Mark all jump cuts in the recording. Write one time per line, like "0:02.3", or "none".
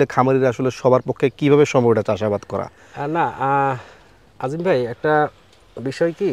none